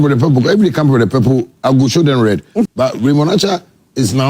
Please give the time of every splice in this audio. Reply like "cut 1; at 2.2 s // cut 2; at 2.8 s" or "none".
cut 1; at 2.7 s